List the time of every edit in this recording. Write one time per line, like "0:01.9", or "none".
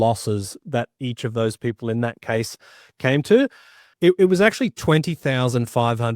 0:03.8